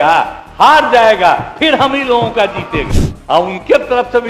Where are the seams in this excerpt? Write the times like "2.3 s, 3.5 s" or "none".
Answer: 2.9 s